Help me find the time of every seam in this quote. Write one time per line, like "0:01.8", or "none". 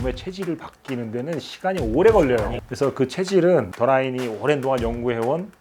0:02.5